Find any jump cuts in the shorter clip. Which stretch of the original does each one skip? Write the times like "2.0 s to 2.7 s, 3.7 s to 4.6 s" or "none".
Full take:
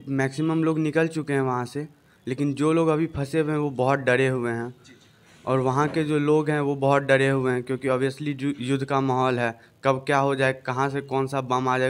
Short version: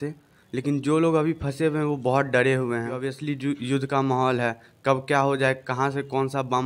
4.8 s to 8.1 s